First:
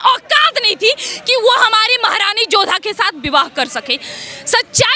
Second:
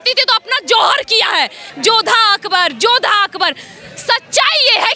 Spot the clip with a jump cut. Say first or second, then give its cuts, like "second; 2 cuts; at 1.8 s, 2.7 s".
second; 1 cut; at 1.7 s